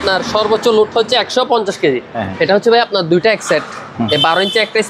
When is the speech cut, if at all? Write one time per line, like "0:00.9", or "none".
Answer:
0:02.1